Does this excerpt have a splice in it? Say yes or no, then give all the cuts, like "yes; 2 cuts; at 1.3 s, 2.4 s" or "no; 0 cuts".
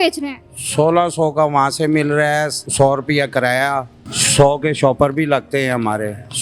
no; 0 cuts